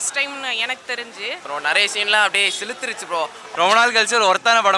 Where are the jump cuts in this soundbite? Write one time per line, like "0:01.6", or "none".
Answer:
0:01.4
0:03.4